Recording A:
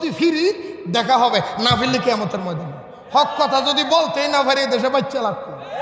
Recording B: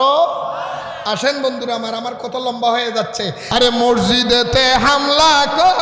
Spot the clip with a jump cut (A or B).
B